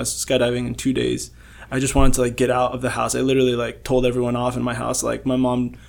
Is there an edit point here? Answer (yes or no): no